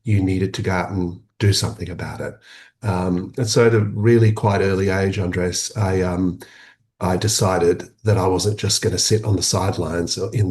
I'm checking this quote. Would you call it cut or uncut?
uncut